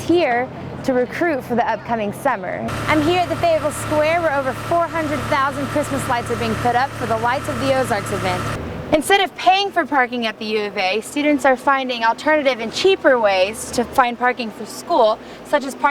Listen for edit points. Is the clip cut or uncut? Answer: cut